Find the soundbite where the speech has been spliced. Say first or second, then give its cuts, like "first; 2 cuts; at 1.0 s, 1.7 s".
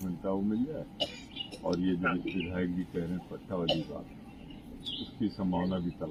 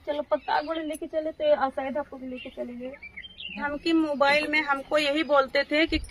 second; 1 cut; at 3.7 s